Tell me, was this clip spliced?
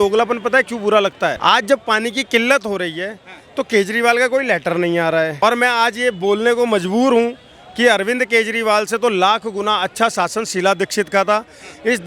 yes; 2 cuts; at 1.4 s, 5.3 s

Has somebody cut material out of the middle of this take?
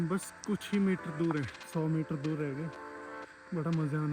yes; 1 cut; at 1.6 s

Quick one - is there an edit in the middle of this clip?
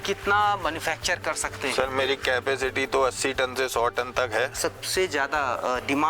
yes; 1 cut; at 4.5 s

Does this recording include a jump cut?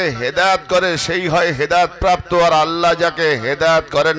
no; 0 cuts

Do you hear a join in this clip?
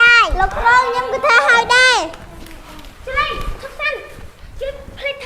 no; 0 cuts

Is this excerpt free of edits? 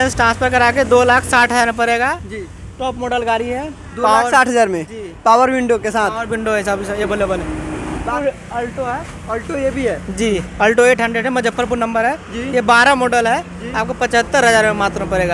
no; 1 cut; at 8.0 s

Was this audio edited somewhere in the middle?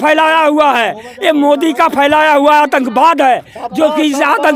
no; 0 cuts

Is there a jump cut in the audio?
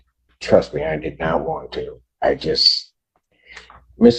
no; 0 cuts

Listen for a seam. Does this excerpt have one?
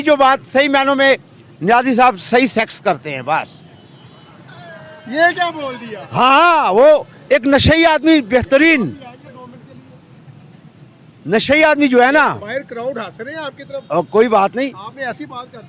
no; 0 cuts

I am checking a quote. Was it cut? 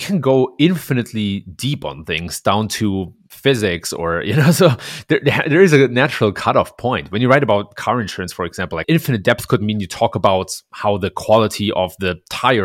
no; 0 cuts

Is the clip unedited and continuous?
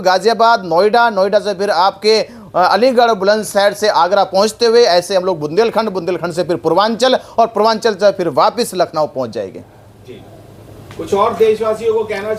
yes; 0 cuts

